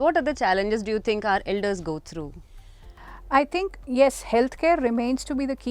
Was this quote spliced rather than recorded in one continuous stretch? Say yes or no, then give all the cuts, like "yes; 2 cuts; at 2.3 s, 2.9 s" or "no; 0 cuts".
no; 0 cuts